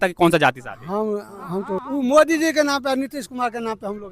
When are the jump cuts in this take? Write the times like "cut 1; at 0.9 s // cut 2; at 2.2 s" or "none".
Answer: cut 1; at 1.8 s

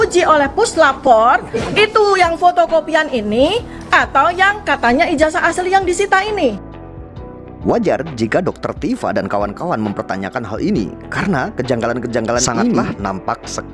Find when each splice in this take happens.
none

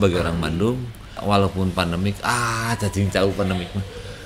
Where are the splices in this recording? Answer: cut 1; at 1.2 s

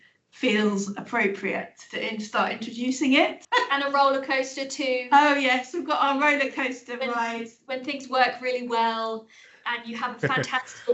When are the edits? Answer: cut 1; at 3.4 s

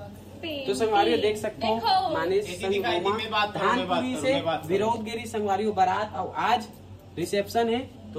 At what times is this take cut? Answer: none

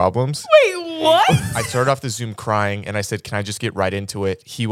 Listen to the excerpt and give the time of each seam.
cut 1; at 1.6 s

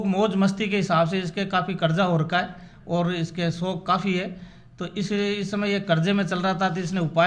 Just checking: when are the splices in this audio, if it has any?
none

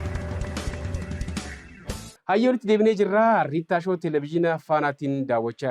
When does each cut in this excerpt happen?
cut 1; at 2.1 s

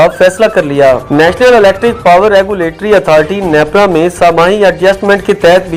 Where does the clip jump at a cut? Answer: none

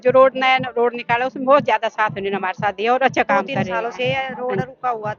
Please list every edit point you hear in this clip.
cut 1; at 3.7 s

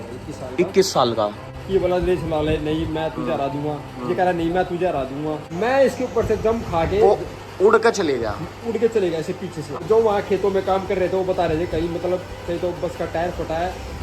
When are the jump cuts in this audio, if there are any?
cut 1; at 1.5 s // cut 2; at 5.5 s // cut 3; at 9.7 s

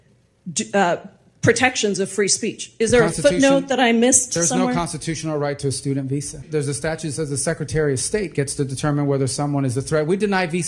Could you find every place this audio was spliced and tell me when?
cut 1; at 6.4 s

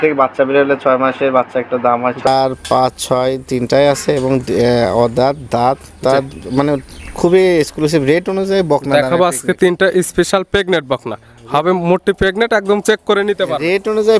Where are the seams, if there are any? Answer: cut 1; at 2.3 s

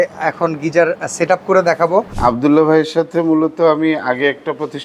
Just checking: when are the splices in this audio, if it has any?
cut 1; at 2.1 s

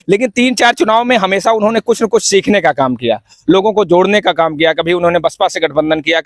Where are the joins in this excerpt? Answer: none

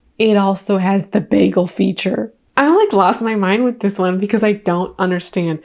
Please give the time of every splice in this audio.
cut 1; at 2.4 s

